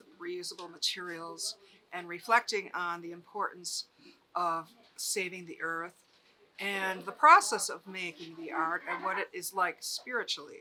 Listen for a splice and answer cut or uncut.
uncut